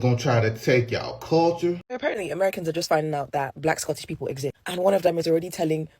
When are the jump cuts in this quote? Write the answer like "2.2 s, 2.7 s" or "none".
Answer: 1.8 s